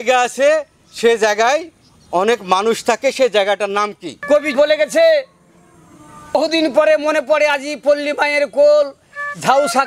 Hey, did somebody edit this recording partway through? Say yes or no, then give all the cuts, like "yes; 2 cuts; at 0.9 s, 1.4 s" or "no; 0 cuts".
yes; 2 cuts; at 4.5 s, 6.3 s